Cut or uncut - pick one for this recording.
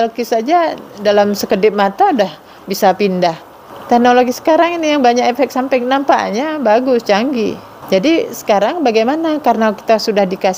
cut